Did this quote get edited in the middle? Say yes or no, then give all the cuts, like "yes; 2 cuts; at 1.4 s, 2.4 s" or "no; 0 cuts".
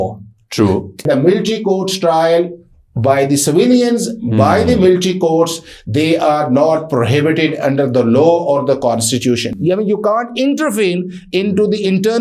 yes; 2 cuts; at 1.0 s, 9.5 s